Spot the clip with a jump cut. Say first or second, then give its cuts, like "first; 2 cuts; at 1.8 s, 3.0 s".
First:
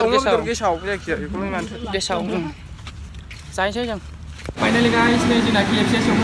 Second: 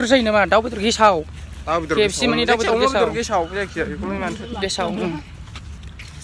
first; 1 cut; at 4.5 s